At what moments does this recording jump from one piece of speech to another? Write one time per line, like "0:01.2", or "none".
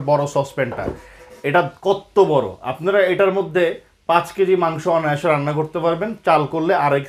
none